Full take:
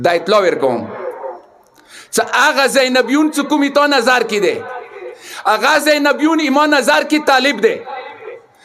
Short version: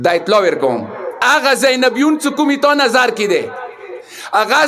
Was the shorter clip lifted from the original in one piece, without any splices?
no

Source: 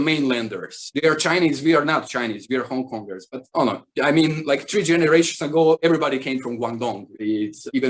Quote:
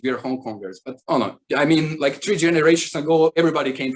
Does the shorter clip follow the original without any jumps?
yes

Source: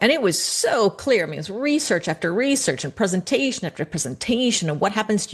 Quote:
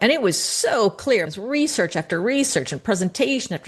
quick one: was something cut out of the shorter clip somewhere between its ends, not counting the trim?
yes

